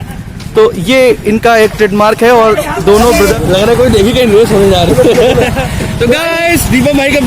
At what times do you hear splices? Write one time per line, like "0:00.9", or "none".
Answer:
0:03.3